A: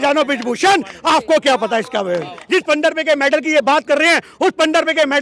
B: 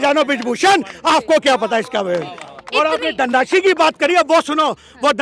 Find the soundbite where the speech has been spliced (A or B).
A